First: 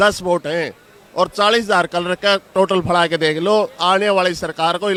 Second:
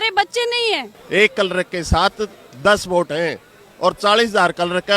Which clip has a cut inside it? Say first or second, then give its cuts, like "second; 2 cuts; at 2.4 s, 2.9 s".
second; 1 cut; at 0.9 s